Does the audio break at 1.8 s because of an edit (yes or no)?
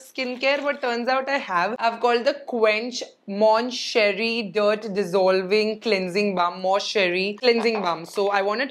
no